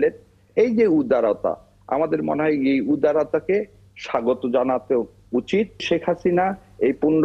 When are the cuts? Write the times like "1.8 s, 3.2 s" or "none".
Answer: 5.8 s